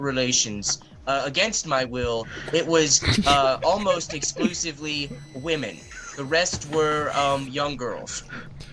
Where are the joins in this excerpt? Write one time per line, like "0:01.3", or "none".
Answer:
none